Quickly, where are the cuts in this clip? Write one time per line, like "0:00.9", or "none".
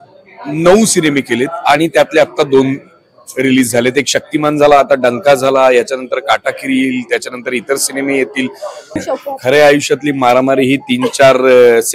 0:09.0